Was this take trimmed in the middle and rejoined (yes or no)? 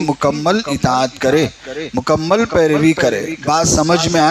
no